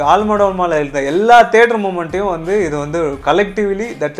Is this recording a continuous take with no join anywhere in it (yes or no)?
yes